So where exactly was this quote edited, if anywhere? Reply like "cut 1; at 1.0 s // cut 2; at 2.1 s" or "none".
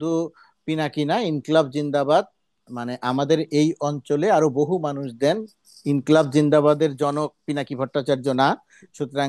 none